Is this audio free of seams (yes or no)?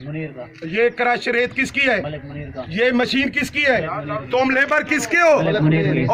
yes